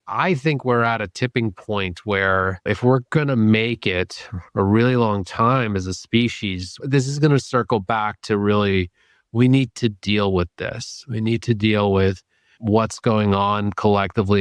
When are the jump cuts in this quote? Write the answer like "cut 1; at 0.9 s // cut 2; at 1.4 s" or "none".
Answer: cut 1; at 2.7 s